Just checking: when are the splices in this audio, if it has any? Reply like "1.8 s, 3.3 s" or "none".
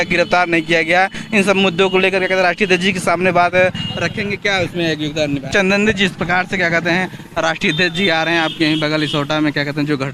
5.5 s